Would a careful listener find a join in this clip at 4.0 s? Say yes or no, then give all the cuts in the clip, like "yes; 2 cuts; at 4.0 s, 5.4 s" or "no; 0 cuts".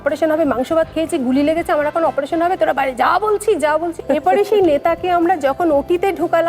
yes; 1 cut; at 4.0 s